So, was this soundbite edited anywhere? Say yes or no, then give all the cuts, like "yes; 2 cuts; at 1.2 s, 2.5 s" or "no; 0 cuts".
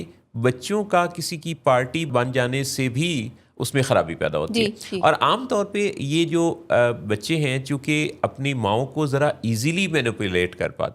yes; 1 cut; at 2.1 s